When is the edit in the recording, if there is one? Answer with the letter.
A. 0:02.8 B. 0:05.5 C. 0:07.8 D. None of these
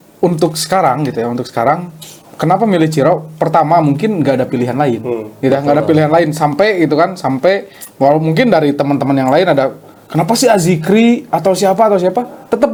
D